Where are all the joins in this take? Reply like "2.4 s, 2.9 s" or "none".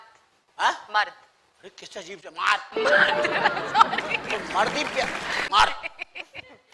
5.3 s